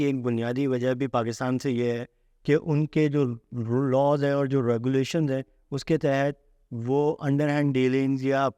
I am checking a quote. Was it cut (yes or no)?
no